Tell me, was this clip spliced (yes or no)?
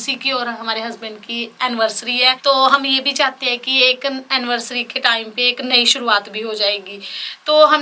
no